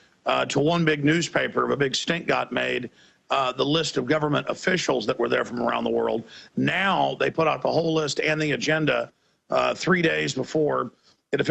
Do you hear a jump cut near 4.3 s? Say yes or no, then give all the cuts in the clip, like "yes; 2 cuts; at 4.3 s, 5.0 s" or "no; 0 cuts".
yes; 1 cut; at 4.3 s